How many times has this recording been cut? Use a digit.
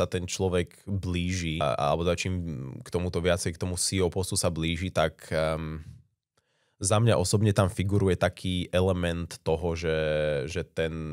1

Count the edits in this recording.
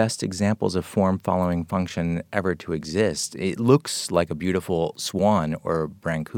0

